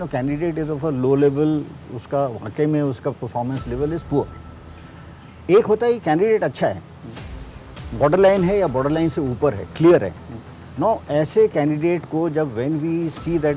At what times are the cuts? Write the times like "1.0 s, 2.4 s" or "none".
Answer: none